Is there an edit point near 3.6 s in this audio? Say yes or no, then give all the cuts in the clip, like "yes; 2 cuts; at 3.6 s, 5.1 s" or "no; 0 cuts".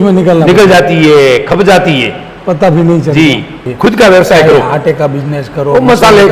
yes; 1 cut; at 3.6 s